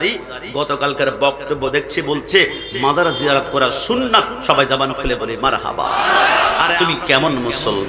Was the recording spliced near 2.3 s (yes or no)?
no